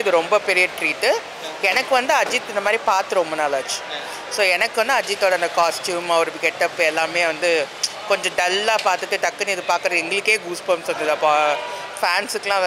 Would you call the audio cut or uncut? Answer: uncut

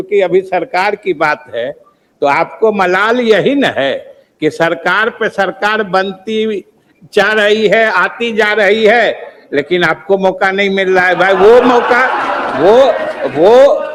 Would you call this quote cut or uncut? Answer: uncut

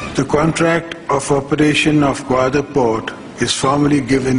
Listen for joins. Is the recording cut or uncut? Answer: uncut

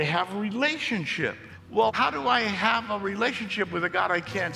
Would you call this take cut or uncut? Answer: cut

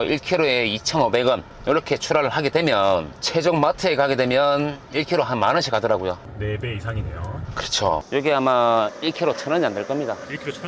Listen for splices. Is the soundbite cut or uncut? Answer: cut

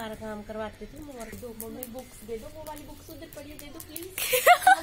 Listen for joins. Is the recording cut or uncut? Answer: cut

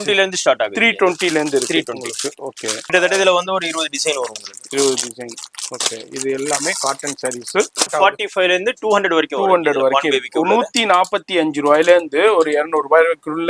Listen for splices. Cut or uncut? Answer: cut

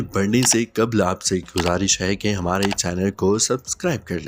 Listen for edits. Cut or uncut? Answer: uncut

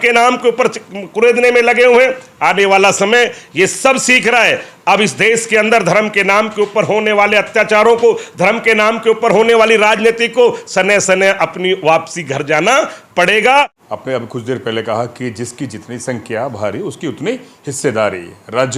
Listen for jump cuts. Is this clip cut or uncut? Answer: cut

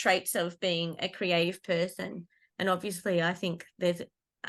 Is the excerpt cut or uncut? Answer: uncut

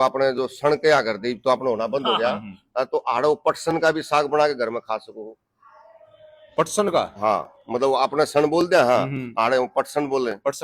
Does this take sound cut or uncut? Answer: uncut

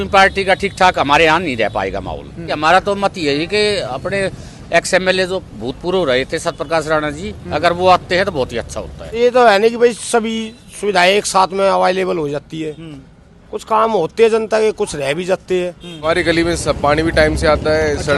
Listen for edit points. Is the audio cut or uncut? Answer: cut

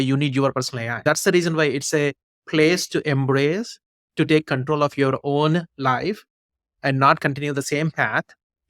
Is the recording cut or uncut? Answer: cut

